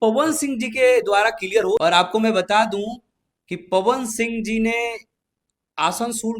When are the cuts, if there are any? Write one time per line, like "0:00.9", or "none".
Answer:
0:01.8